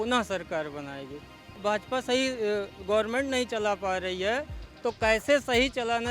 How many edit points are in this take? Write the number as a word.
one